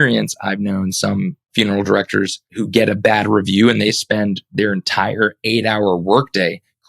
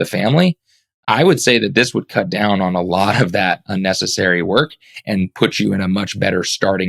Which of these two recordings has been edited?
first; 2 cuts; at 1.5 s, 2.4 s

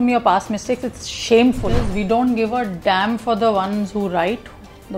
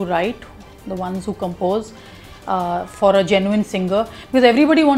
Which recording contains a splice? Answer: first; 1 cut; at 1.7 s

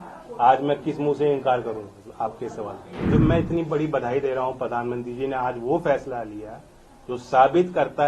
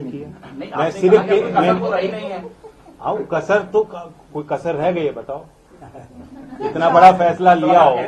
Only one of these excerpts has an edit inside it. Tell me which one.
first; 1 cut; at 3.0 s

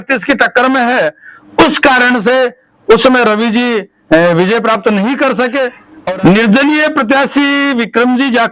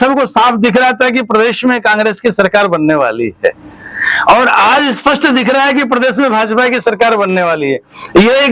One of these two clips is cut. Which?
first; 1 cut; at 5.8 s

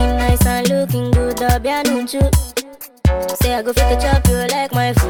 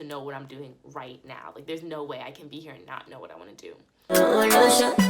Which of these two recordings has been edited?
second; 1 cut; at 4.1 s

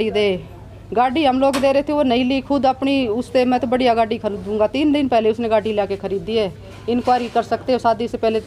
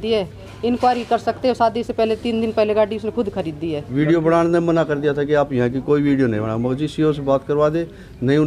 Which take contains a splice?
second; 1 cut; at 3.8 s

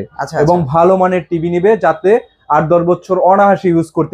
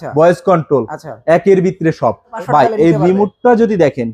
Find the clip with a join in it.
second; 1 cut; at 2.4 s

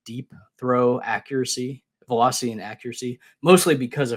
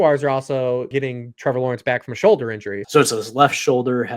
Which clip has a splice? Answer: second; 2 cuts; at 0.9 s, 2.7 s

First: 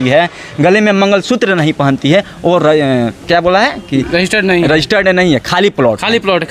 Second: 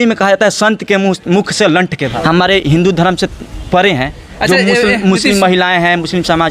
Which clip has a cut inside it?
second; 1 cut; at 2.1 s

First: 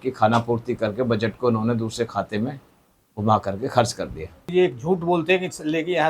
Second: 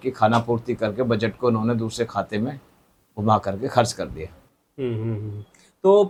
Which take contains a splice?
first; 1 cut; at 4.5 s

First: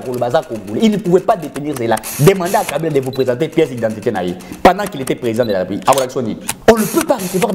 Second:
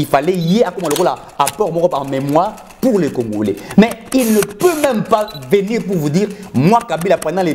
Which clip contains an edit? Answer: first; 1 cut; at 6.5 s

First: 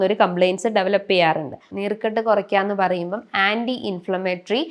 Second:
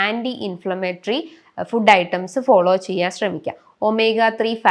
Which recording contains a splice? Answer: first; 1 cut; at 1.6 s

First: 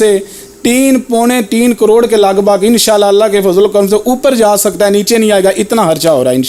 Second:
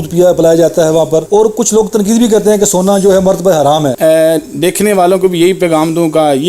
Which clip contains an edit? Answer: second; 2 cuts; at 1.3 s, 3.9 s

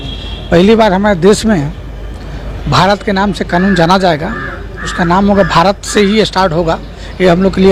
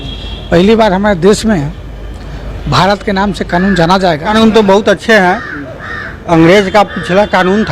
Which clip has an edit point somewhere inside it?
second; 1 cut; at 4.3 s

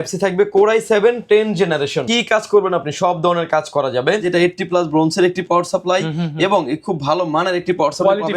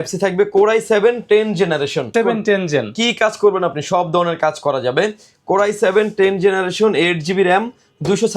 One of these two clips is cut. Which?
first; 2 cuts; at 2.0 s, 4.3 s

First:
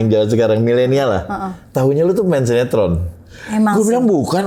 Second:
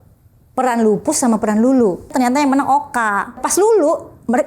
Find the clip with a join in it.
second; 2 cuts; at 2.1 s, 3.4 s

